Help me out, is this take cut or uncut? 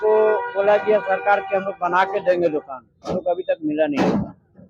uncut